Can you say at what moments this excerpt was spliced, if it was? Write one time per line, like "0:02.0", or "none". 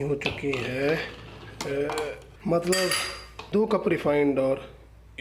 0:02.3